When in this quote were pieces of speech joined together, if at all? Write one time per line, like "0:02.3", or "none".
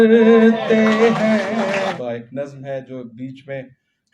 0:01.9